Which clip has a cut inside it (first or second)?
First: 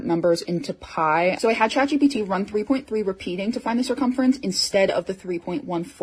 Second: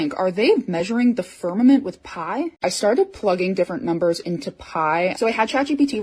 second